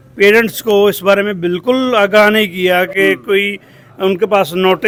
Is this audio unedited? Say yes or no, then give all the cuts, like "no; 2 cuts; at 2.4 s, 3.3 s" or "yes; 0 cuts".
yes; 0 cuts